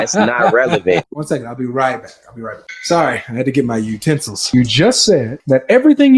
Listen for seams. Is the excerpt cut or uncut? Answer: cut